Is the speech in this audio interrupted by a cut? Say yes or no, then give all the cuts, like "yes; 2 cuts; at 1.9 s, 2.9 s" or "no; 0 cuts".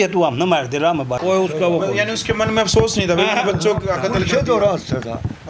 yes; 1 cut; at 1.2 s